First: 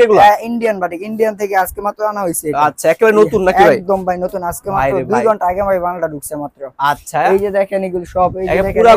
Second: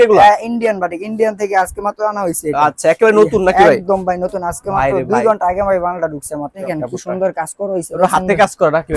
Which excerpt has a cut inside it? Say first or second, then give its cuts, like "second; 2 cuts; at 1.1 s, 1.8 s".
second; 1 cut; at 6.7 s